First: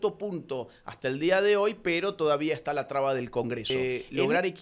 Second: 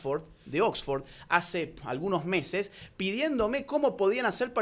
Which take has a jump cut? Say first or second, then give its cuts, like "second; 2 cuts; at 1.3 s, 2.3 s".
first; 1 cut; at 3.7 s